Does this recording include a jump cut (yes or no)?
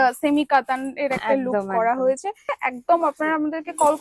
yes